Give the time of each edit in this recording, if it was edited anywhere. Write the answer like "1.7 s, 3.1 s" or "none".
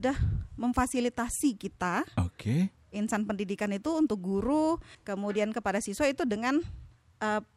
4.9 s